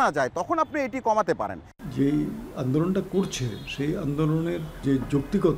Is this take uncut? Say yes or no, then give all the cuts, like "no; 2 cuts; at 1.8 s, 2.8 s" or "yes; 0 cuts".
no; 2 cuts; at 1.7 s, 4.8 s